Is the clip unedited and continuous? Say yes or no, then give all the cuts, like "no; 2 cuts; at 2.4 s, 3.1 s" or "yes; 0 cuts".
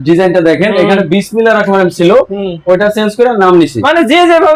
yes; 0 cuts